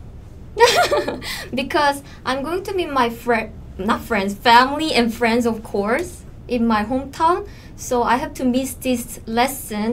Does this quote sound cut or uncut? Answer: uncut